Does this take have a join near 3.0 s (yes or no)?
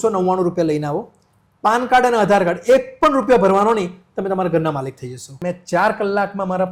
no